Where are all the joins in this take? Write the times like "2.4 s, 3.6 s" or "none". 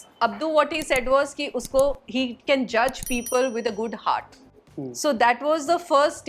none